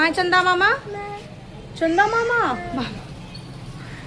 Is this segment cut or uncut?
cut